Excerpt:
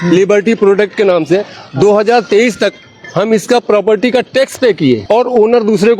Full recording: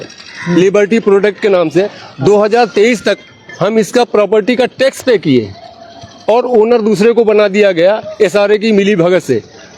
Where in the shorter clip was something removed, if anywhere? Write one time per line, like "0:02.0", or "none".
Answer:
0:05.0